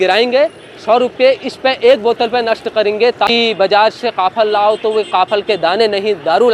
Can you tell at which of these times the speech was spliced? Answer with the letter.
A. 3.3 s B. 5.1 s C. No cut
A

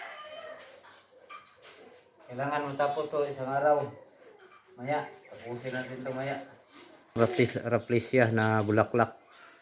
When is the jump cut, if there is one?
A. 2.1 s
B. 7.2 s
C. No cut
B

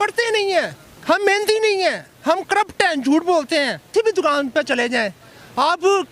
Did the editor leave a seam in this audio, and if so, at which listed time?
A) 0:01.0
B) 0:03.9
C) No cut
B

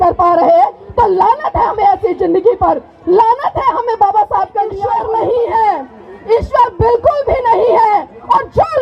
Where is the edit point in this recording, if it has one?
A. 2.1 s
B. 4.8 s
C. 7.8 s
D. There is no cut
B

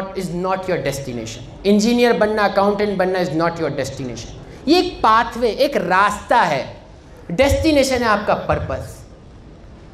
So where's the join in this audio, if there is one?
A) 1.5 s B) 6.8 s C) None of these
C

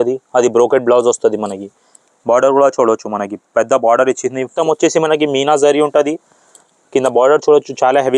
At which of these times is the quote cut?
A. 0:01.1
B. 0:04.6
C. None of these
B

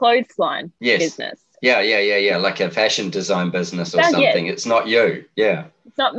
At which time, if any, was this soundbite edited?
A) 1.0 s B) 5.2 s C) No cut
C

